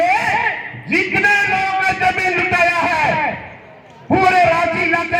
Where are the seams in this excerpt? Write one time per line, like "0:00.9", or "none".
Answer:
none